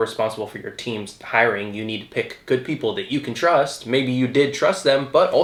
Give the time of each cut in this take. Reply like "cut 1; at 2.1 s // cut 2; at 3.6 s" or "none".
none